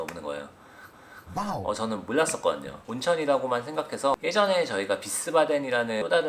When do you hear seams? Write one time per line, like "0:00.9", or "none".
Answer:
none